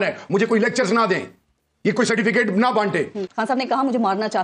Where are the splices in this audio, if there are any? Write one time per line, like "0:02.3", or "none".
0:03.3